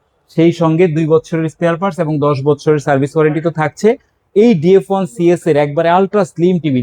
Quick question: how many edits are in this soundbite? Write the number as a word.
zero